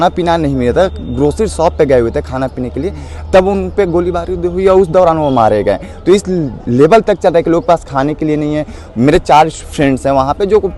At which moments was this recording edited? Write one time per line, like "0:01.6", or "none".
none